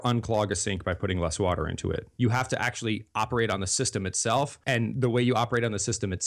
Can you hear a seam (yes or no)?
yes